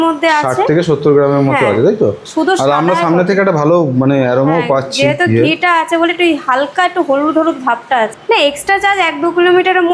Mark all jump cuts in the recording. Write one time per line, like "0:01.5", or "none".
0:02.2
0:08.2